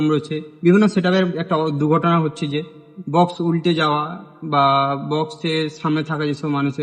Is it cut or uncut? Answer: uncut